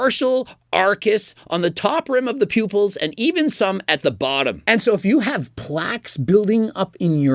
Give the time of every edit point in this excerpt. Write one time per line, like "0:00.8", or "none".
0:04.6